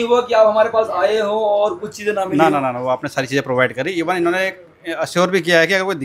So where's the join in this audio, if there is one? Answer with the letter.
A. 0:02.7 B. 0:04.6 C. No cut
C